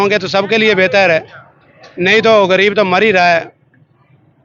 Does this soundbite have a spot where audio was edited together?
no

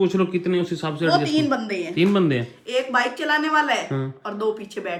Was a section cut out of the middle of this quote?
no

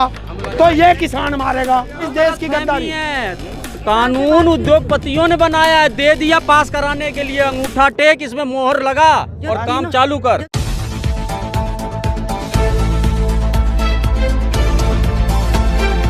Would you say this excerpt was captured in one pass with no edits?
no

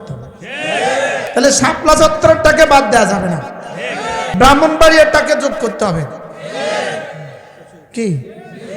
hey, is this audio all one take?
no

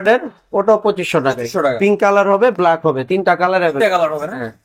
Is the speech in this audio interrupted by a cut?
no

